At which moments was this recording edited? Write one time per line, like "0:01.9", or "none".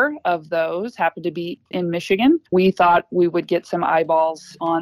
0:01.6
0:02.5